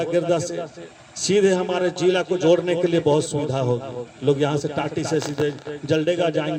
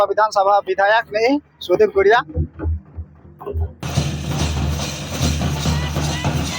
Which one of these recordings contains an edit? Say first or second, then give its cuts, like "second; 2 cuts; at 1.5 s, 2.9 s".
second; 1 cut; at 3.9 s